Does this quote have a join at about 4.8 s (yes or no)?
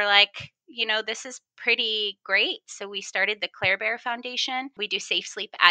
yes